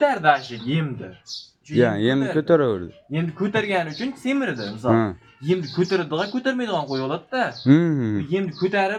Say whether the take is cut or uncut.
uncut